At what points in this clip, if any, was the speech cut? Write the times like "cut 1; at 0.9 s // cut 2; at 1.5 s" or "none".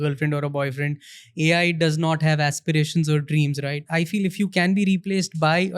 cut 1; at 3.8 s